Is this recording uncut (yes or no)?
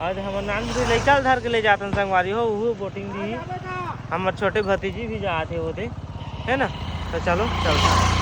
yes